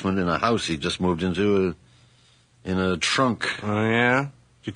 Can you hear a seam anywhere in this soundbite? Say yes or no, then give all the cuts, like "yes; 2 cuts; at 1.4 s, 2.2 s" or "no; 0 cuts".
no; 0 cuts